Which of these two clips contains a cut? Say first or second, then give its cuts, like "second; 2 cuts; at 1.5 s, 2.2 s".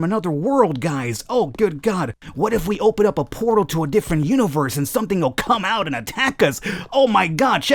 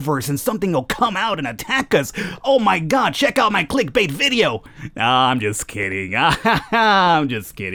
first; 1 cut; at 2.2 s